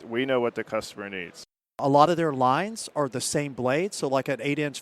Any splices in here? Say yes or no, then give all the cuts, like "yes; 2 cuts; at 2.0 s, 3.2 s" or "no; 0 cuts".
yes; 1 cut; at 1.8 s